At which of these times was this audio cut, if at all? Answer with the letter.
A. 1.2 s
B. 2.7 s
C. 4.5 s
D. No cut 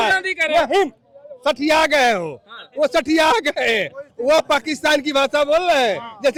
D